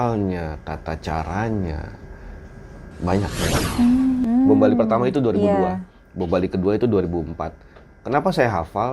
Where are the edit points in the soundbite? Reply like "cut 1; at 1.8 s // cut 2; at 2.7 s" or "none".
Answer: cut 1; at 4.2 s